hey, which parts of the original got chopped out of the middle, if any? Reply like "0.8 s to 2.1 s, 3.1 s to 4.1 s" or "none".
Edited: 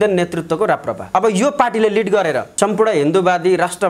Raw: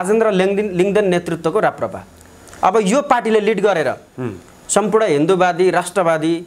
2.0 s to 2.6 s, 4.0 s to 4.6 s